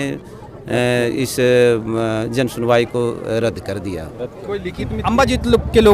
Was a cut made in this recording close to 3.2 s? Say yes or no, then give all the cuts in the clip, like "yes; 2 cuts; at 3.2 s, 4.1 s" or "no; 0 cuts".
no; 1 cut; at 5.0 s